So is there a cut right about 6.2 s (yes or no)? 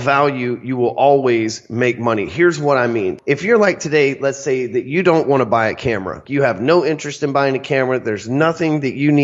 yes